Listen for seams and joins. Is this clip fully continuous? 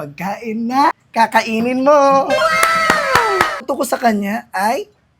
no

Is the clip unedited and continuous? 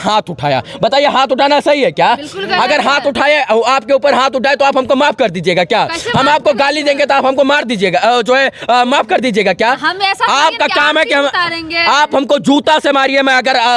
yes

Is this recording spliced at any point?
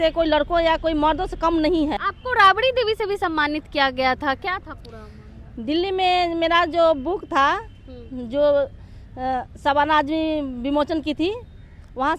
yes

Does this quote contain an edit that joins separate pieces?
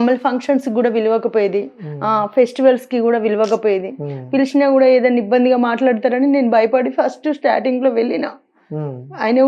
no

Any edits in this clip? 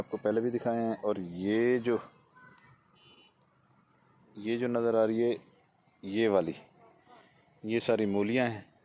no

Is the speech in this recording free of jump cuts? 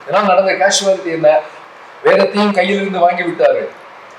no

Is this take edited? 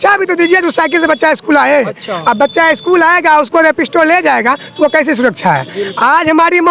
no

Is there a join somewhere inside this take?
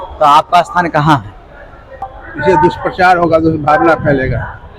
yes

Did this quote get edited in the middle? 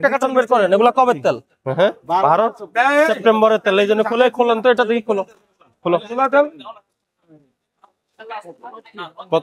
yes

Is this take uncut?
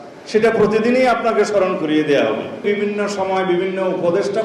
no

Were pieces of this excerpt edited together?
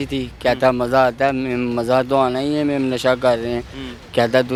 no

